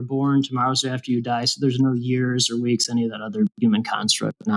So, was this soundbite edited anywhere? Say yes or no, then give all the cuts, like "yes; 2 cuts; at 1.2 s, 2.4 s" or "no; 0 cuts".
no; 0 cuts